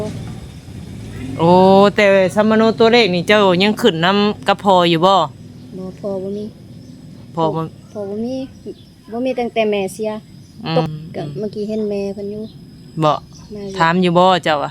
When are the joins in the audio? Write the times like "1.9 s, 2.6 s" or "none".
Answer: 10.9 s